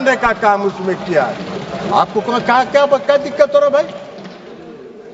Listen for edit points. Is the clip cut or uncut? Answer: uncut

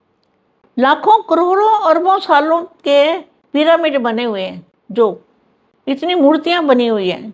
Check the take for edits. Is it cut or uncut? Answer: uncut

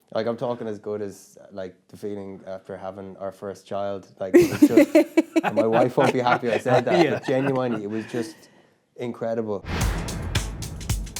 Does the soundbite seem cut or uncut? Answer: cut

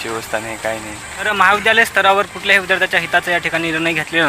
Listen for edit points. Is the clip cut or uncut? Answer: cut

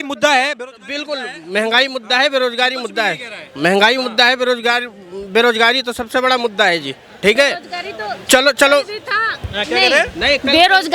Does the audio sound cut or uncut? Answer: uncut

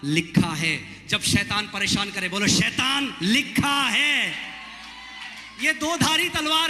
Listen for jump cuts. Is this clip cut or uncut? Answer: uncut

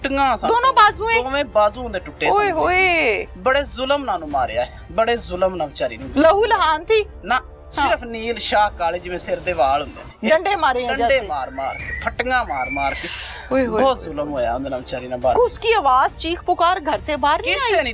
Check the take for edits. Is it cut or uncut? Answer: uncut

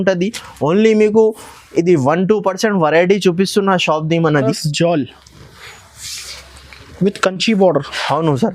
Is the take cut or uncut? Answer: cut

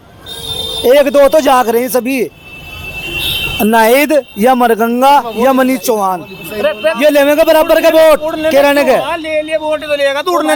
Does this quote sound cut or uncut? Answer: uncut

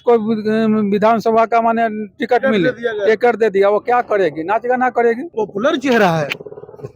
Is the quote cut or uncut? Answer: cut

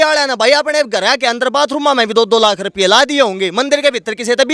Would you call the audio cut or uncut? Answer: uncut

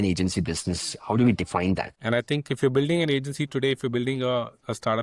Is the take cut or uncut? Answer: cut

